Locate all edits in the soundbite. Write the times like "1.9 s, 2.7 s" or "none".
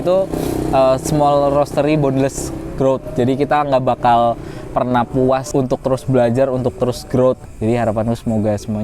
5.5 s, 7.4 s